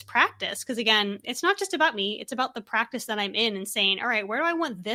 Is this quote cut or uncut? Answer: uncut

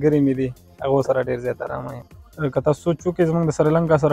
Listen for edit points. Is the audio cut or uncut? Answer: cut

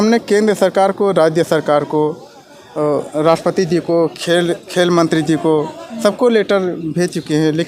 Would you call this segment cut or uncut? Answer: uncut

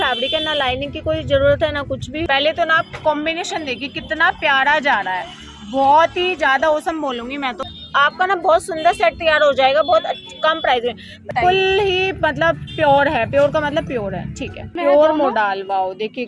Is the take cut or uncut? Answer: cut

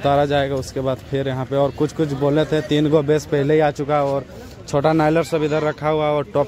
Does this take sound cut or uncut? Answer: uncut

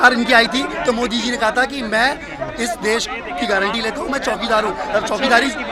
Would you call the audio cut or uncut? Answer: uncut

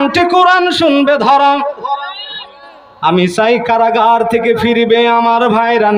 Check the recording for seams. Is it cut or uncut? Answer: uncut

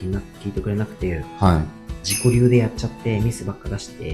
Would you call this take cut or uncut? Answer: uncut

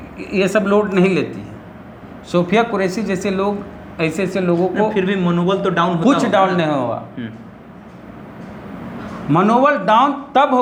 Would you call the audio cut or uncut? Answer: uncut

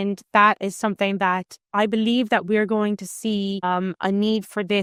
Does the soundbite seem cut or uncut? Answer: uncut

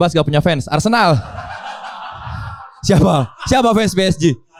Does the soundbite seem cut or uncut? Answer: uncut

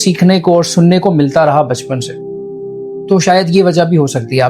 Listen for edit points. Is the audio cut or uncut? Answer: uncut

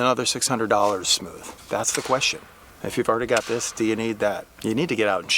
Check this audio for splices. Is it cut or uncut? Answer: cut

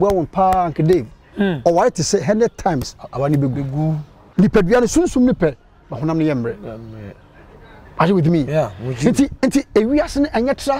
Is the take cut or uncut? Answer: cut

